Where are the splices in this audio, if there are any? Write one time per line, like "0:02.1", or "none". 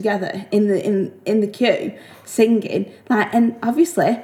none